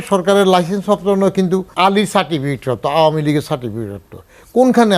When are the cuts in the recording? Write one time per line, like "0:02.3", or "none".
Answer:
0:01.7